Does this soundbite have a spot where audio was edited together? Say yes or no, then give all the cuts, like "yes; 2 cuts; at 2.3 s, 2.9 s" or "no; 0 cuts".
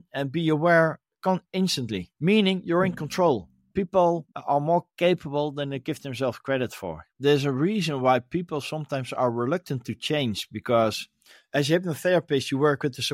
yes; 2 cuts; at 3.7 s, 7.1 s